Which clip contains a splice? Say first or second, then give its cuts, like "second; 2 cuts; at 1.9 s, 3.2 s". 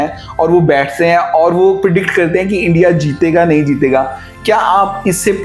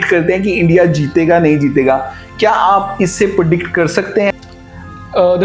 second; 1 cut; at 4.3 s